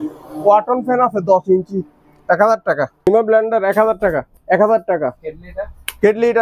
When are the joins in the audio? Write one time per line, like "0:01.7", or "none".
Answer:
0:03.1
0:04.3
0:05.2